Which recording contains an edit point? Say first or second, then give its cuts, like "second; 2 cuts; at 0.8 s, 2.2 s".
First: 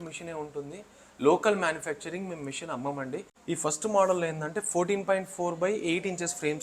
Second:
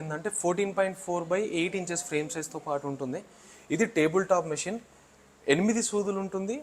first; 1 cut; at 3.3 s